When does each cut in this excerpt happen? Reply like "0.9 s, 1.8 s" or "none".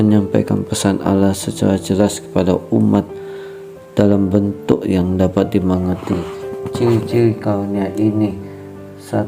4.6 s